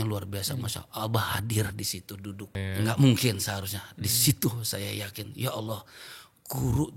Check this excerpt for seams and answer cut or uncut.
cut